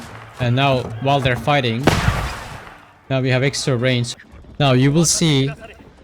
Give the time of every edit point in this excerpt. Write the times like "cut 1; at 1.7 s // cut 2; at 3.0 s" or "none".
cut 1; at 4.1 s